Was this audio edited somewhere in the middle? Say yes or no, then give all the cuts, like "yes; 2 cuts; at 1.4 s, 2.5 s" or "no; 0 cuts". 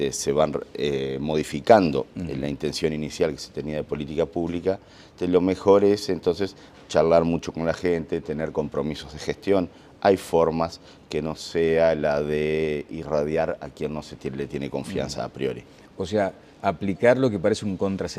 no; 0 cuts